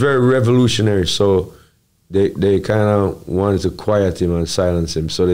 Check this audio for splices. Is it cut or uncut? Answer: uncut